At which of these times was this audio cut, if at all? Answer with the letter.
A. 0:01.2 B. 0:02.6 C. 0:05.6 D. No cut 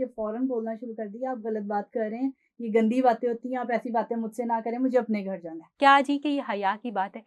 C